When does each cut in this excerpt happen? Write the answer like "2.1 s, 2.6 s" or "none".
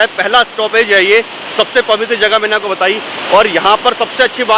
none